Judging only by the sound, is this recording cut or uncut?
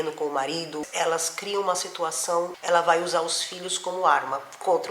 cut